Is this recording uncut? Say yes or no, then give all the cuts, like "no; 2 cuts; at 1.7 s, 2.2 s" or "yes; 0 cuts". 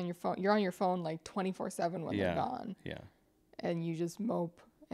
yes; 0 cuts